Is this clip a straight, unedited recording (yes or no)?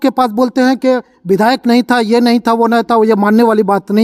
yes